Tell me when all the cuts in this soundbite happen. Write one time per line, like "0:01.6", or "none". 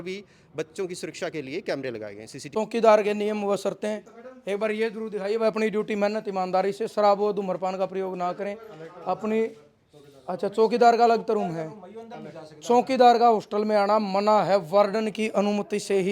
0:02.5